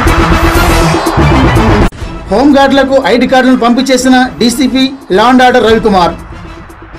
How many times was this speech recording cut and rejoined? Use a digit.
1